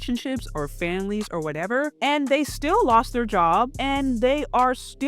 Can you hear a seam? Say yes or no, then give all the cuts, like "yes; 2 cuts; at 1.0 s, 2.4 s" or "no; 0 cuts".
yes; 2 cuts; at 1.9 s, 3.8 s